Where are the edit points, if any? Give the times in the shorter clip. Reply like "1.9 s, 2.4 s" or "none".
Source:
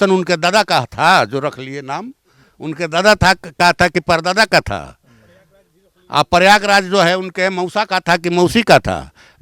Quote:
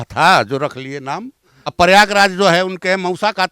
1.7 s